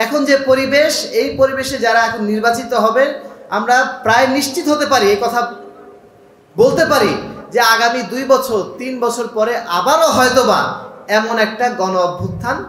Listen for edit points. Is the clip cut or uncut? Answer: uncut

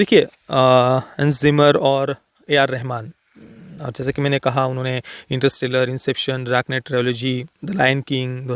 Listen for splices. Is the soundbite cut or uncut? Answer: uncut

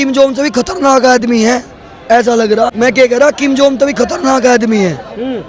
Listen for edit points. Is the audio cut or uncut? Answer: uncut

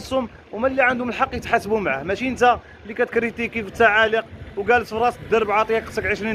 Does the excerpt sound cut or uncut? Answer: uncut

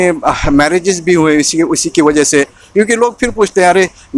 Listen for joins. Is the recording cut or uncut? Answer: uncut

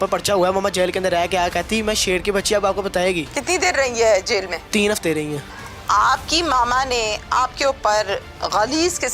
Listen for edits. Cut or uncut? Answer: cut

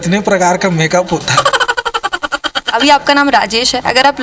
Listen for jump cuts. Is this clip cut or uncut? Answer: cut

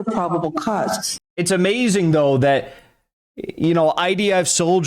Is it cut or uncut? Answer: cut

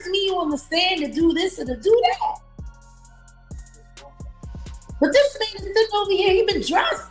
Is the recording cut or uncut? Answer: cut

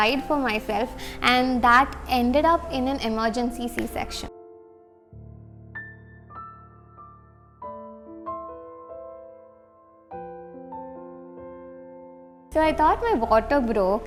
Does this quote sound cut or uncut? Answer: uncut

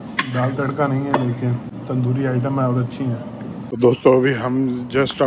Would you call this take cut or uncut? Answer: cut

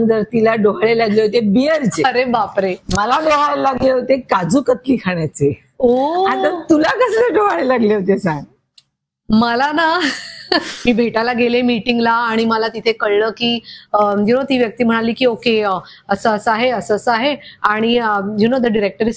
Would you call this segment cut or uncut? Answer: cut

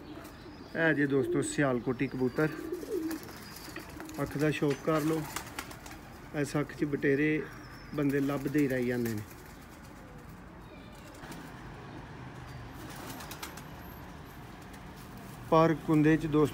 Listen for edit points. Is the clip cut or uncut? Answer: cut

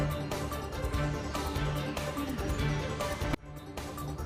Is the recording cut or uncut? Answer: uncut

